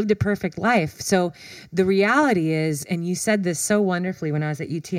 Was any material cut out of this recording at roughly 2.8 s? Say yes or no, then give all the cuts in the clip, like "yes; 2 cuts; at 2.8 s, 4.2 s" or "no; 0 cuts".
yes; 1 cut; at 2.8 s